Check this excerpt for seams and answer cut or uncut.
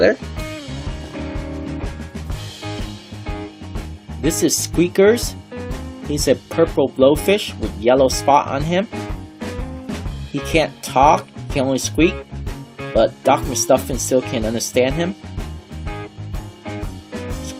cut